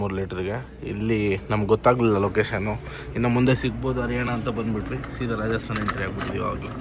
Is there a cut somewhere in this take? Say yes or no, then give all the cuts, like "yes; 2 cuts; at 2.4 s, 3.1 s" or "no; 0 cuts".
no; 0 cuts